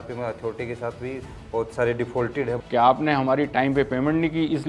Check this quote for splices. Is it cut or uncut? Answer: cut